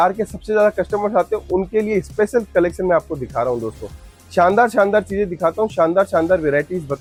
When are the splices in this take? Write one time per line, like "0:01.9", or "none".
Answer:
none